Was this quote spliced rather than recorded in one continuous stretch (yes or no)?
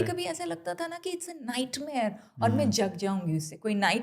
no